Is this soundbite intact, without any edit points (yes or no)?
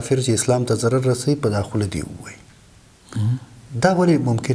yes